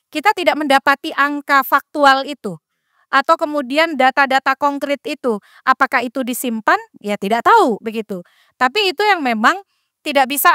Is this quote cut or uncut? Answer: uncut